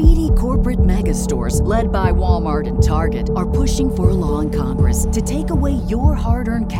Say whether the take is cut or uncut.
uncut